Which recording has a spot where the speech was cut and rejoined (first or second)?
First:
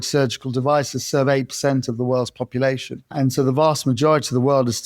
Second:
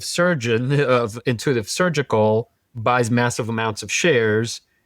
first